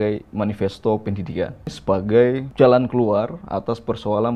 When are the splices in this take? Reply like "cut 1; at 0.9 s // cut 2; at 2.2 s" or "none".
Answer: cut 1; at 1.7 s // cut 2; at 2.5 s